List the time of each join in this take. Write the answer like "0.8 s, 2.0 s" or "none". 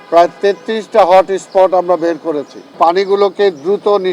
2.8 s